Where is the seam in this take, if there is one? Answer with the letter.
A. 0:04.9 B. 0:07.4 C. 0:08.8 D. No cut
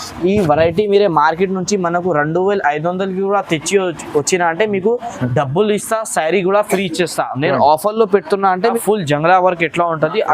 C